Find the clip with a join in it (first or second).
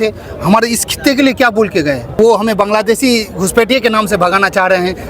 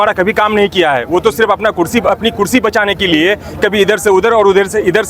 first